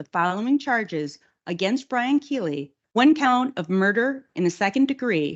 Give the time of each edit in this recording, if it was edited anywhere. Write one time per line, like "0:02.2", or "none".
0:02.8